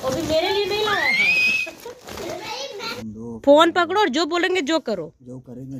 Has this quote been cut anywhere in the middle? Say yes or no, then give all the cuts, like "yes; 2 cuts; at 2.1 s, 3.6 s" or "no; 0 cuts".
yes; 1 cut; at 2.9 s